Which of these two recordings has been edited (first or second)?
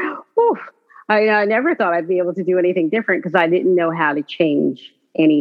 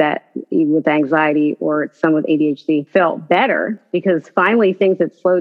second